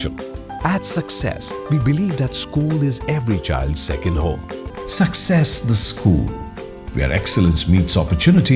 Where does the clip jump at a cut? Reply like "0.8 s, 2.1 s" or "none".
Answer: 4.7 s